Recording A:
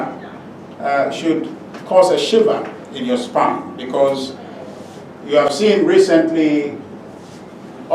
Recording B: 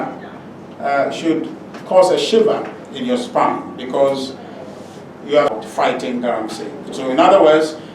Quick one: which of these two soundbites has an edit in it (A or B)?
B